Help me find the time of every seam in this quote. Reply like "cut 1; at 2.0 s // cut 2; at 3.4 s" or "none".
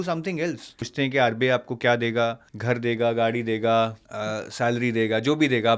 cut 1; at 0.9 s // cut 2; at 2.5 s // cut 3; at 4.1 s